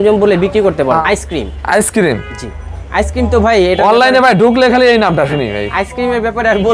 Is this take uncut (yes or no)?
no